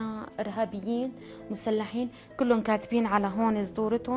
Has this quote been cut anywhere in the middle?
no; 0 cuts

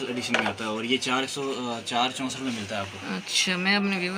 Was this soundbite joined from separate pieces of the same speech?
no; 0 cuts

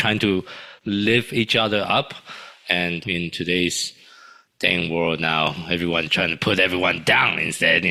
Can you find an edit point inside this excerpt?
no; 0 cuts

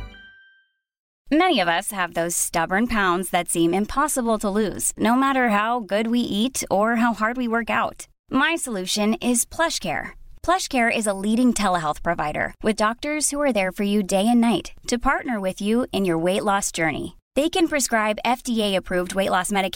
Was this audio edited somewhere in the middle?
yes; 1 cut; at 1.2 s

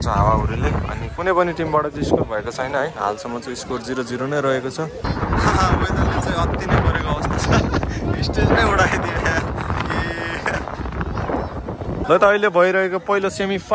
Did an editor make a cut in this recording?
yes; 2 cuts; at 5.0 s, 12.0 s

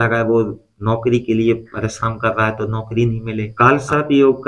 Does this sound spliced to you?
yes; 1 cut; at 3.4 s

